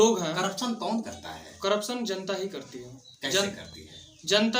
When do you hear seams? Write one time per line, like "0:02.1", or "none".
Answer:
none